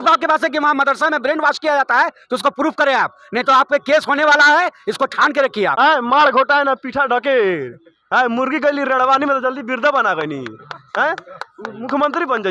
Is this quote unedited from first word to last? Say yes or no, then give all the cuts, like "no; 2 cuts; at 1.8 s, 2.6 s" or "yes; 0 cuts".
no; 1 cut; at 5.7 s